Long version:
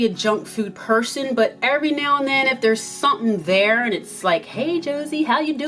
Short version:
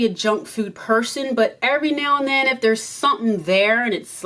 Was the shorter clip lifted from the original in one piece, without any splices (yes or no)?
yes